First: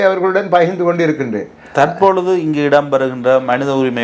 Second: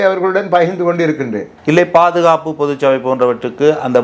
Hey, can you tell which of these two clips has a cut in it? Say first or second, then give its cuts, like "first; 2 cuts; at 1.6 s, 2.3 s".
second; 1 cut; at 1.5 s